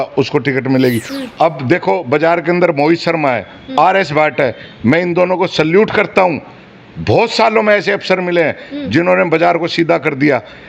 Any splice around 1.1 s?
yes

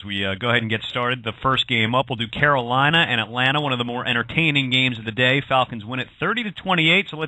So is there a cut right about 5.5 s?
yes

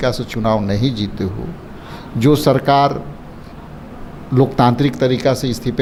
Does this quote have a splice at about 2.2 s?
no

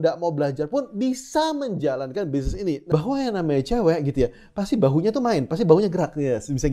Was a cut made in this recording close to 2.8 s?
yes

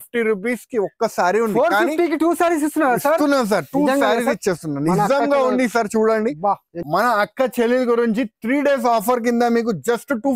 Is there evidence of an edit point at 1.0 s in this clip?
no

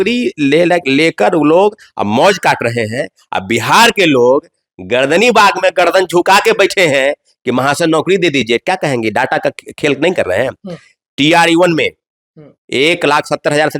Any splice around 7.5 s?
no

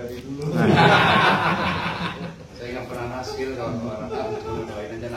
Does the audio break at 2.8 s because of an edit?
no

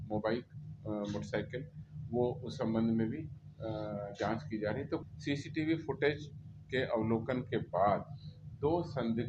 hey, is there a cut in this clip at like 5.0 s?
yes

